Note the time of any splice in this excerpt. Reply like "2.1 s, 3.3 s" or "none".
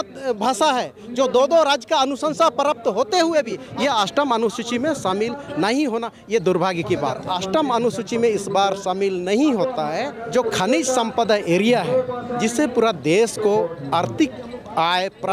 3.6 s, 7.2 s, 10.2 s